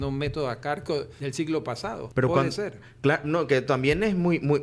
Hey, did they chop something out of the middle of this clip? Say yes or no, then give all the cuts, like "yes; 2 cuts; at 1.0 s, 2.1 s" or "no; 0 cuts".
yes; 2 cuts; at 1.1 s, 2.0 s